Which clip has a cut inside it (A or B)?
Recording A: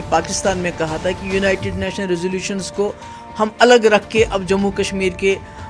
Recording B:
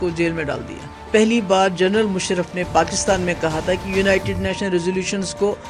B